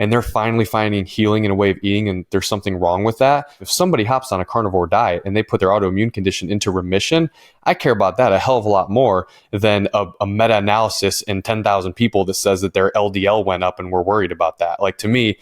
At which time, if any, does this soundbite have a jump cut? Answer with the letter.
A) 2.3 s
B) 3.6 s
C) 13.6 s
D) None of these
B